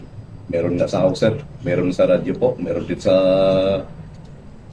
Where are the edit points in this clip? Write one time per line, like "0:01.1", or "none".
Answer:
none